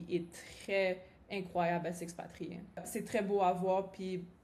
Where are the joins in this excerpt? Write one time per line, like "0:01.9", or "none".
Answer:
0:02.9